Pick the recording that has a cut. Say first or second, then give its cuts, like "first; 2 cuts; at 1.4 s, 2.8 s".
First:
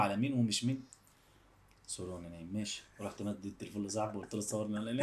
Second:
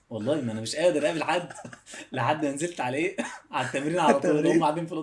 first; 1 cut; at 1.7 s